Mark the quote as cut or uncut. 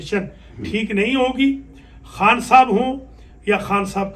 uncut